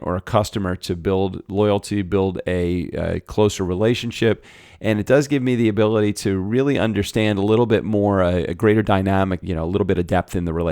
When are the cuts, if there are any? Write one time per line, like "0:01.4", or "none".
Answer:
0:09.4